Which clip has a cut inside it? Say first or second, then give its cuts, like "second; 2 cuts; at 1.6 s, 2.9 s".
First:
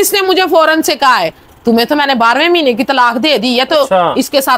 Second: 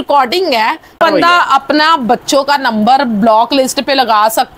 second; 1 cut; at 1.0 s